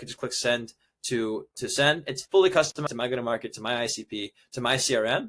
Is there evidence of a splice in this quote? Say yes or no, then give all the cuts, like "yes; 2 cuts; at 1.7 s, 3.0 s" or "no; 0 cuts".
yes; 1 cut; at 2.9 s